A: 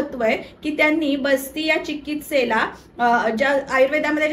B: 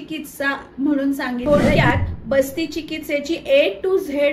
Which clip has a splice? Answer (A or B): B